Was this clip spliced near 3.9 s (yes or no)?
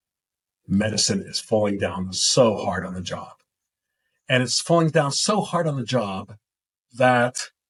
no